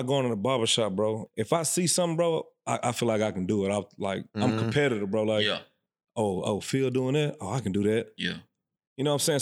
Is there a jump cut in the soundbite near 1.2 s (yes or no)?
yes